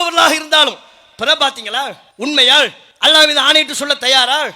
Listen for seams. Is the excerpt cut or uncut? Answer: cut